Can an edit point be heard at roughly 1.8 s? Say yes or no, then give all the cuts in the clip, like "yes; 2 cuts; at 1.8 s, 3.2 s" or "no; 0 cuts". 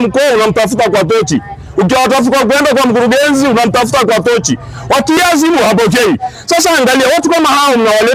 no; 1 cut; at 5.2 s